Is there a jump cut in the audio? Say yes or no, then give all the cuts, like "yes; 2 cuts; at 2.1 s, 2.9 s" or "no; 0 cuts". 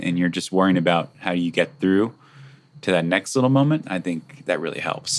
no; 0 cuts